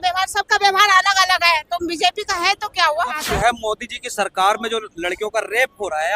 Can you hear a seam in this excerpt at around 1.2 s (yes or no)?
no